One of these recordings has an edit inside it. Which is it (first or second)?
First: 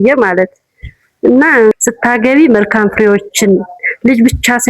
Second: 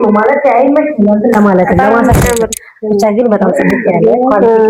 first